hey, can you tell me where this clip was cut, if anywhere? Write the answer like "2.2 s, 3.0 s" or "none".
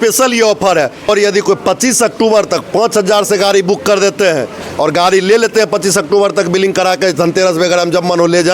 1.1 s

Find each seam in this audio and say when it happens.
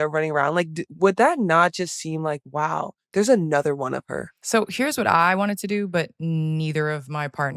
4.3 s

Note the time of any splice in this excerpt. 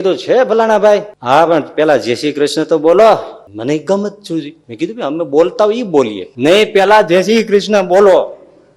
1.1 s, 3.4 s, 4.6 s, 6.2 s

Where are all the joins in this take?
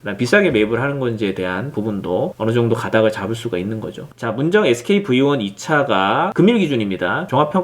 4.1 s

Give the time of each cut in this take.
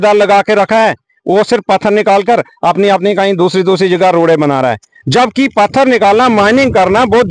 none

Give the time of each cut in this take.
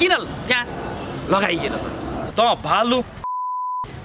2.2 s

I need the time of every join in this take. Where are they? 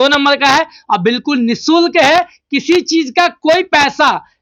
none

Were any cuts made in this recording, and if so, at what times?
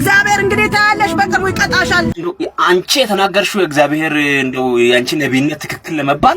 2.1 s

